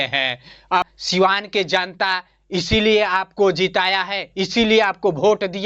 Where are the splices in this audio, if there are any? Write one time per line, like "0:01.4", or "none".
0:00.9